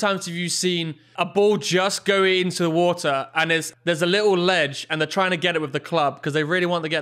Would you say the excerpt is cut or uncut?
cut